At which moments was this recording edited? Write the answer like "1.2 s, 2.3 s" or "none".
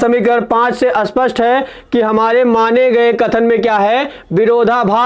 none